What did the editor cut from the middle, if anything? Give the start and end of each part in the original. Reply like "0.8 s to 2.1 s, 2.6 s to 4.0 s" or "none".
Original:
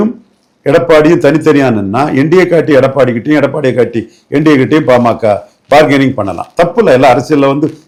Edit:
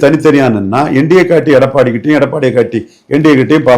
none